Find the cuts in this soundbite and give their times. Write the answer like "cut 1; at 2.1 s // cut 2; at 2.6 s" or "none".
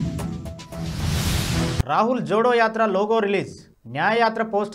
cut 1; at 1.8 s